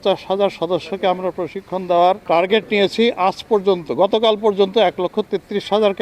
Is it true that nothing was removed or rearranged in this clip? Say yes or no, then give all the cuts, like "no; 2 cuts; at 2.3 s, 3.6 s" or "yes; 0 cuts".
no; 1 cut; at 2.2 s